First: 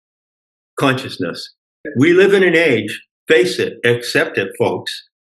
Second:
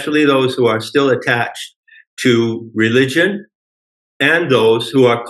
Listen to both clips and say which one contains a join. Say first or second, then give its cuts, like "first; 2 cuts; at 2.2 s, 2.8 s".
first; 1 cut; at 1.8 s